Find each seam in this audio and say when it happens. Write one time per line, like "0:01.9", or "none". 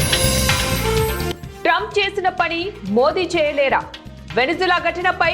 0:01.3